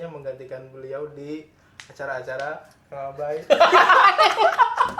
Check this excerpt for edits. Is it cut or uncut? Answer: uncut